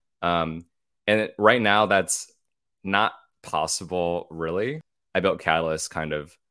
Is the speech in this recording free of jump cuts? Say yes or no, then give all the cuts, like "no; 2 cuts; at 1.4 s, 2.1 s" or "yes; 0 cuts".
no; 1 cut; at 4.9 s